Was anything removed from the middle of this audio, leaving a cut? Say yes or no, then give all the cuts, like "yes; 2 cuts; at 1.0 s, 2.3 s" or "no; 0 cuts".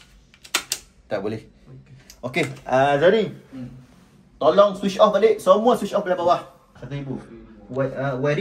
yes; 1 cut; at 6.7 s